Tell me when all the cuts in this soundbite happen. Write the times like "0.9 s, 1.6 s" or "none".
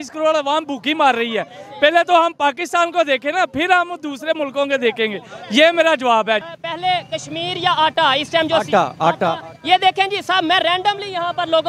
6.5 s